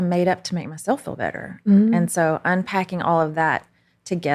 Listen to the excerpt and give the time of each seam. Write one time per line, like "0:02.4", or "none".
none

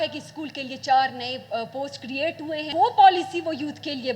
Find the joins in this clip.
0:02.7

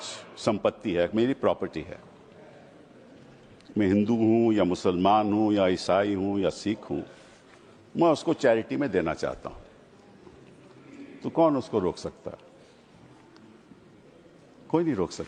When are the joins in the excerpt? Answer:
none

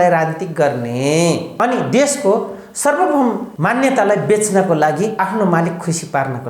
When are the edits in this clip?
0:01.5
0:03.5
0:05.1

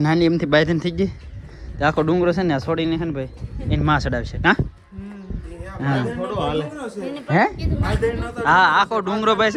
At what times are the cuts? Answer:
none

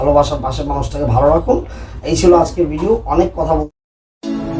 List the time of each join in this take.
0:03.7

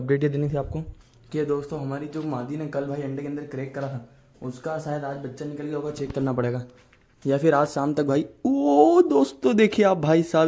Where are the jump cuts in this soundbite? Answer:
none

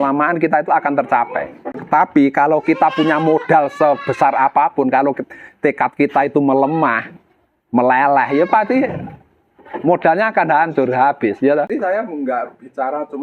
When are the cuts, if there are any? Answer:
0:01.8
0:11.7

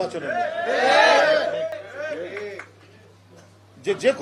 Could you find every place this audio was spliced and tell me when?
0:01.8

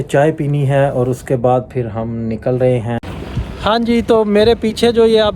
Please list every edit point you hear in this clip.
0:03.1

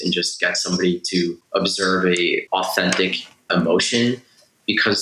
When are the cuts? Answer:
0:01.4
0:02.4
0:03.5

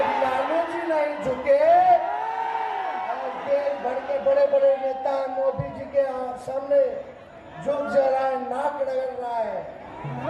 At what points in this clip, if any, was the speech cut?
none

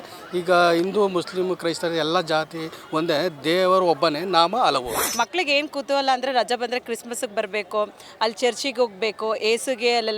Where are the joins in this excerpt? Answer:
0:05.0

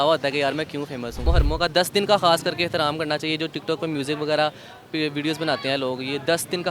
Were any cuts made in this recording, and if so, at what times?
0:01.2

